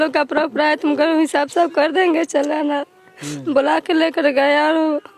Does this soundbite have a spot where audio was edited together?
no; 0 cuts

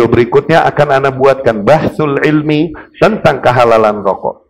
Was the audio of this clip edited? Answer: no; 0 cuts

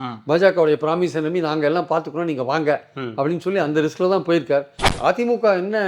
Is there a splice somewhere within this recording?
yes; 1 cut; at 4.8 s

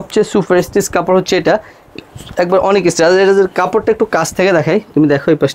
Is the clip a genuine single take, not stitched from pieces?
yes; 0 cuts

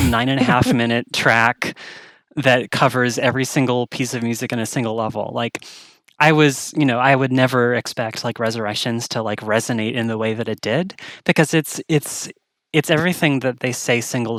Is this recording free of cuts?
yes; 0 cuts

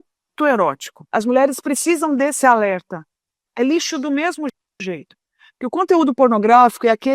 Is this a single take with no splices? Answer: no; 1 cut; at 1.1 s

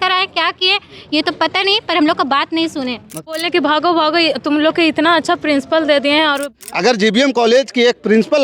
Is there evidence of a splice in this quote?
yes; 2 cuts; at 3.2 s, 6.4 s

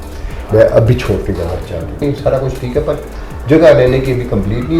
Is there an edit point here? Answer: yes; 1 cut; at 2.0 s

